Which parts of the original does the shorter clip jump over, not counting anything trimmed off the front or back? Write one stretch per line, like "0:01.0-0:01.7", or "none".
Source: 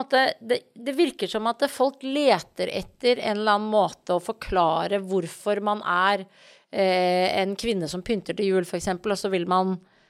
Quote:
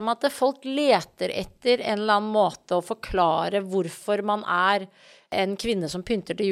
0:06.7-0:07.3